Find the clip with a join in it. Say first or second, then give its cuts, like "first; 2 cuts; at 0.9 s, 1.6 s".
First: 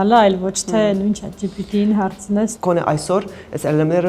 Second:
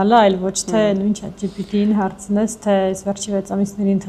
first; 1 cut; at 2.6 s